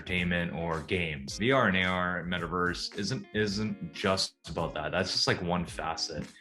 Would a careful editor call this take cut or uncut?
cut